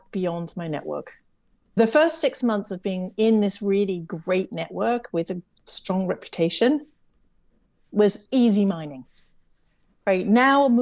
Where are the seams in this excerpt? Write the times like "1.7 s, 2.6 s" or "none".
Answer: 1.8 s